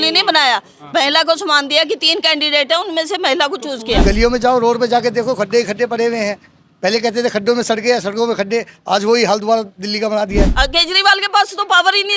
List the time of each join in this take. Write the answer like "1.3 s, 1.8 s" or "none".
4.0 s, 10.5 s